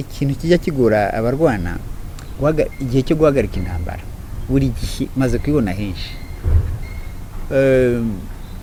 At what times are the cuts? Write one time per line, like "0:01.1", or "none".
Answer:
none

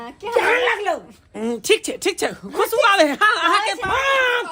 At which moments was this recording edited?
0:01.3

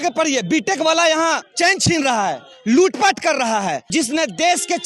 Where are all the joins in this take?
0:01.5
0:03.9

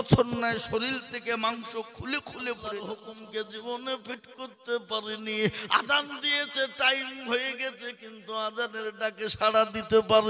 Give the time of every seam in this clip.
0:03.1

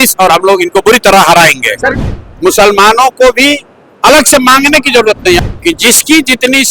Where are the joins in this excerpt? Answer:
0:01.9
0:05.4

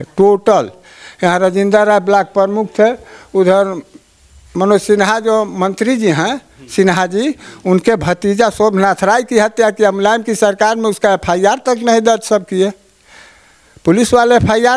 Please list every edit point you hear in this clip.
none

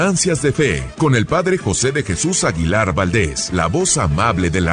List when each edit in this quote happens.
0:00.8
0:03.4

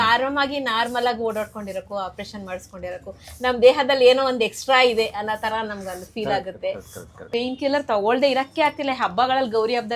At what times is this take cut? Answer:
0:07.2

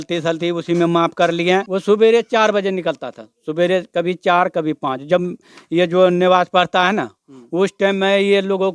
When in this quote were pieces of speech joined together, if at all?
0:01.7

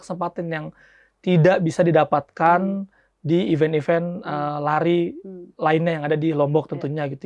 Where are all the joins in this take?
none

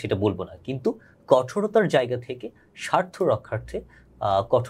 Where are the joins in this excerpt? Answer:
none

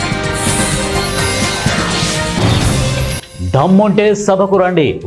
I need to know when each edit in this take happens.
0:03.2

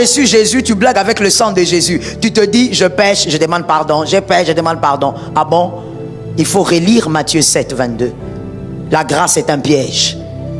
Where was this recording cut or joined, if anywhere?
none

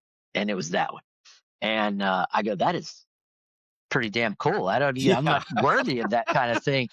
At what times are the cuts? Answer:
none

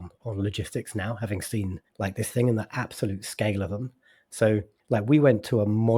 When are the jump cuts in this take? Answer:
0:01.8
0:04.7

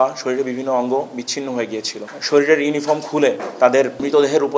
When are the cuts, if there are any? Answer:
0:02.1

